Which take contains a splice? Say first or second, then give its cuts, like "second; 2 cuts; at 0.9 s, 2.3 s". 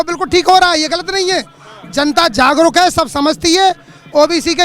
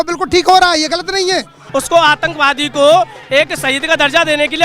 second; 1 cut; at 1.6 s